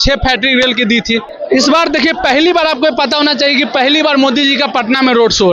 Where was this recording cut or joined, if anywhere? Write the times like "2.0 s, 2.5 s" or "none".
1.3 s